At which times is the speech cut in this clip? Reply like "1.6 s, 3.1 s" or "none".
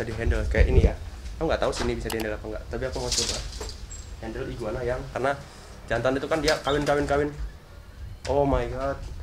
5.1 s